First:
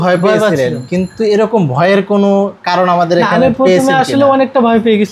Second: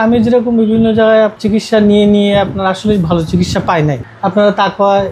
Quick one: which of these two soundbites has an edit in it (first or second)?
second